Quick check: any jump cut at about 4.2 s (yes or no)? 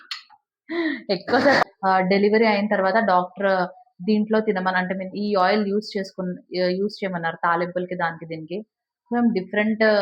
no